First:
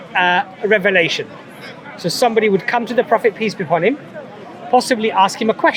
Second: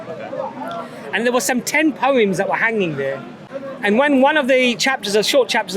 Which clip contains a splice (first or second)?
second